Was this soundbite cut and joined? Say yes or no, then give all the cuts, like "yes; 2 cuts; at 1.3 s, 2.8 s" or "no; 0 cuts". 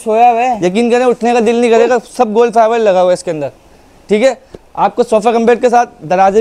no; 0 cuts